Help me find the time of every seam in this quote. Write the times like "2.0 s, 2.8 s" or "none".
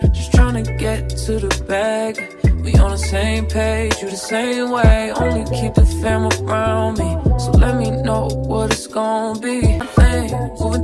9.8 s

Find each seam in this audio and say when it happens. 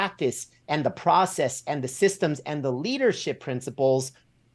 none

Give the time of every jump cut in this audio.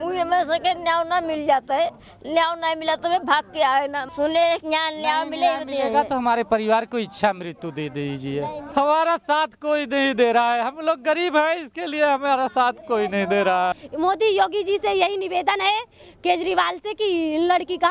4.0 s, 8.6 s, 13.7 s

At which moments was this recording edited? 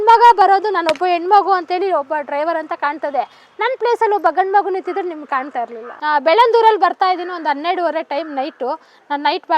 5.8 s

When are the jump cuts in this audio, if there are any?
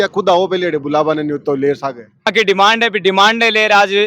2.3 s

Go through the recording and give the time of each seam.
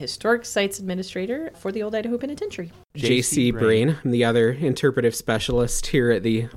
1.5 s, 3.0 s

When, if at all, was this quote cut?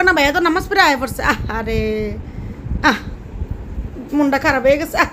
none

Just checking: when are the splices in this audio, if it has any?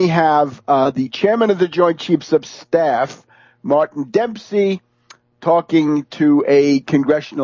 4.4 s

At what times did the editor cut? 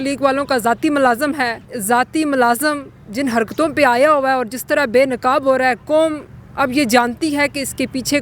1.7 s

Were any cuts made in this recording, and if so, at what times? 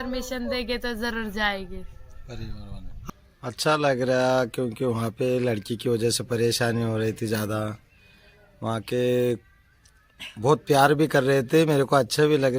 2.9 s

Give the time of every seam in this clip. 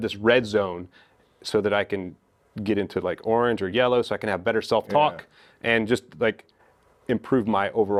none

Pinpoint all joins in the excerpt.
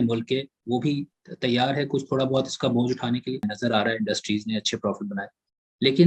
3.4 s

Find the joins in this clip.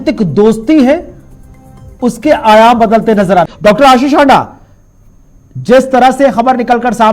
3.5 s

